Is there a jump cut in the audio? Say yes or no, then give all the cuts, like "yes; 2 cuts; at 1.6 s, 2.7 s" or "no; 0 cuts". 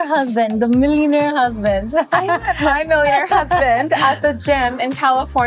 no; 0 cuts